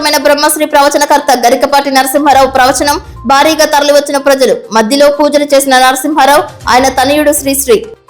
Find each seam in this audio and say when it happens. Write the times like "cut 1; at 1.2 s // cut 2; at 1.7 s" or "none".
none

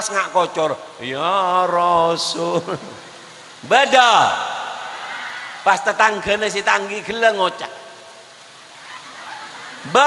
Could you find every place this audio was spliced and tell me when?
none

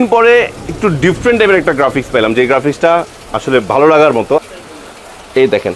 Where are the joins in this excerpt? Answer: cut 1; at 4.4 s

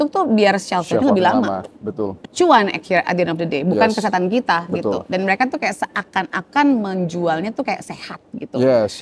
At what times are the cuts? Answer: none

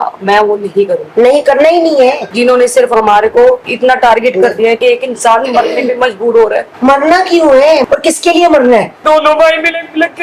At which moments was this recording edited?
cut 1; at 2.2 s // cut 2; at 4.8 s // cut 3; at 7.8 s // cut 4; at 9.0 s

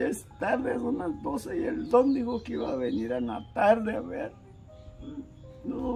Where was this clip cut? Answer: none

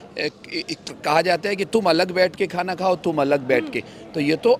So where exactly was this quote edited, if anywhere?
none

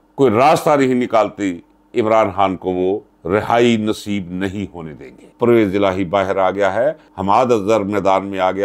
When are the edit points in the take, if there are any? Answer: cut 1; at 5.3 s

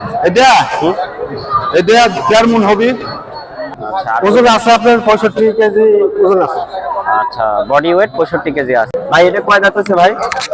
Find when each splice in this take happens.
cut 1; at 3.7 s // cut 2; at 8.9 s

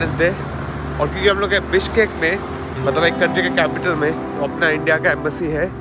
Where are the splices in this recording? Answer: none

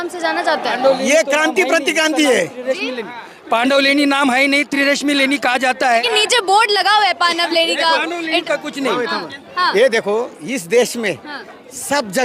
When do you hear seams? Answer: cut 1; at 6.0 s

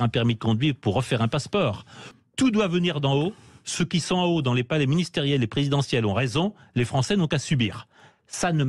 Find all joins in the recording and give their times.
cut 1; at 2.2 s

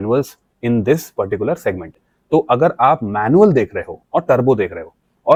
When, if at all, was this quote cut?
none

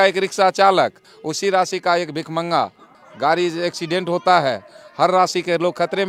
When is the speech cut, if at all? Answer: none

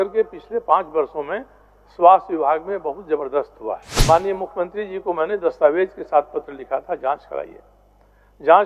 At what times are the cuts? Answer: cut 1; at 3.9 s

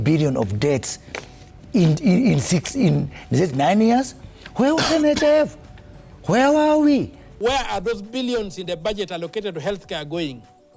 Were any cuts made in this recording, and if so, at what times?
cut 1; at 7.2 s

